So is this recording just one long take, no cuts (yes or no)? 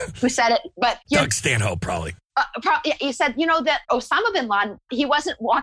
no